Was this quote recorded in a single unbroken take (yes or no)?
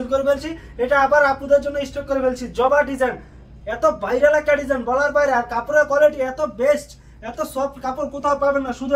yes